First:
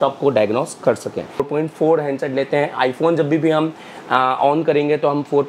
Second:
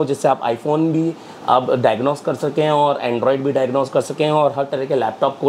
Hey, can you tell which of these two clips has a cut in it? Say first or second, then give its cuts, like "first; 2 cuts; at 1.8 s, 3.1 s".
first; 1 cut; at 1.5 s